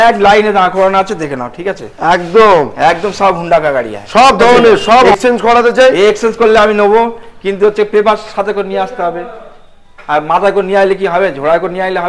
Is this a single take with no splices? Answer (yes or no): no